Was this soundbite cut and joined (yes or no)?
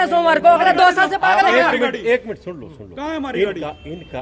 no